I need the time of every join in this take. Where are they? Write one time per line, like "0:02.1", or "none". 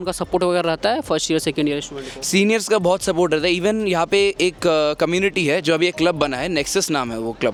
none